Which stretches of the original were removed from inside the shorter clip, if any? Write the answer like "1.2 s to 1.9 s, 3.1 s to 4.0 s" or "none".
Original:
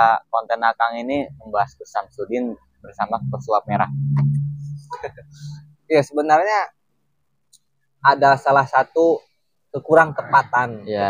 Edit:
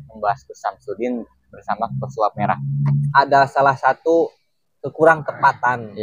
4.4 s to 8.0 s